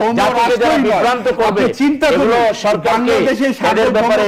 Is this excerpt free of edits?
yes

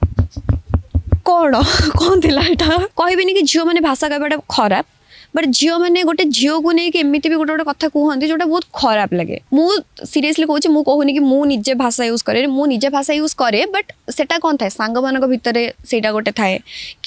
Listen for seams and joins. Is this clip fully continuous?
no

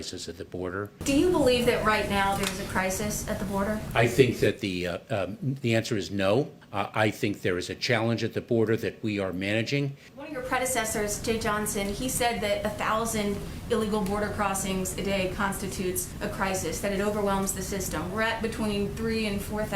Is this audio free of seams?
no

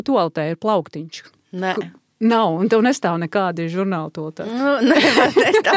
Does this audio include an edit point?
no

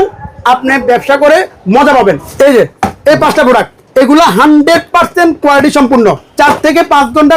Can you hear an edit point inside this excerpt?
yes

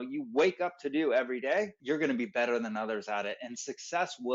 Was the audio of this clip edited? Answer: yes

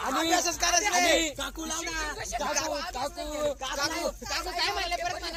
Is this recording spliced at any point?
no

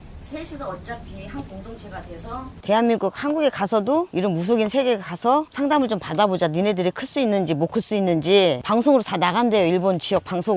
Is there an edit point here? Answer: yes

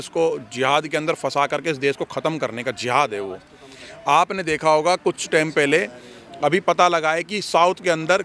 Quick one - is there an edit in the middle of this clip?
no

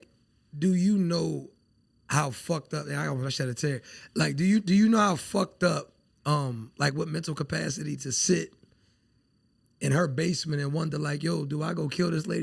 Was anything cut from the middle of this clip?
no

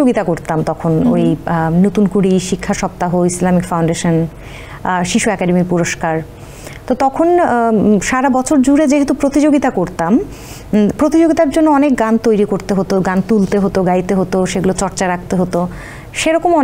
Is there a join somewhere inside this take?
no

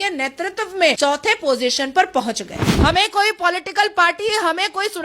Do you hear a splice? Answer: yes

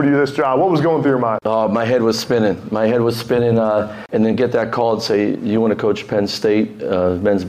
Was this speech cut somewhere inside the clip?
yes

